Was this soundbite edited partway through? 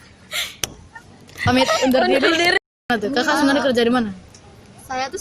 yes; 1 cut; at 2.9 s

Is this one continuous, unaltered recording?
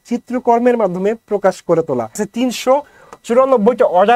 no; 1 cut; at 2.2 s

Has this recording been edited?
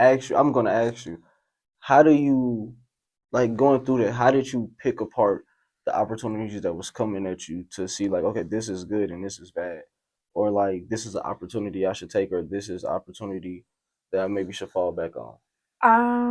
no; 0 cuts

